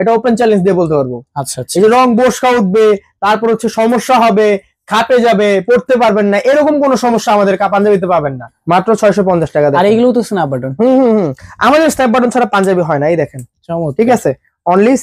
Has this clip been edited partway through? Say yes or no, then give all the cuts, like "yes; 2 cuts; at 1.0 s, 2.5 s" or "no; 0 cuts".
no; 0 cuts